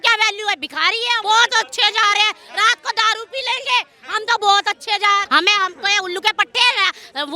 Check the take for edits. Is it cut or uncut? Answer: cut